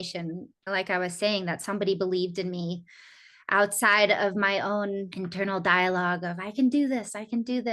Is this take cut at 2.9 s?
no; 1 cut; at 5.1 s

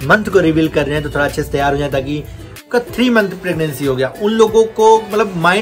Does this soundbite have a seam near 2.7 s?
yes; 1 cut; at 2.7 s

